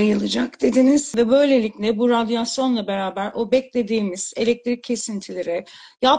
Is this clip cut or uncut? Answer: cut